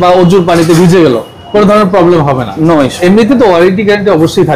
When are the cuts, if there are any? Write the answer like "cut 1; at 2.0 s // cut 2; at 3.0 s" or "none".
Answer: cut 1; at 2.9 s